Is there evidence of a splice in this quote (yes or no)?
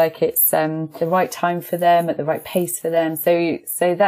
yes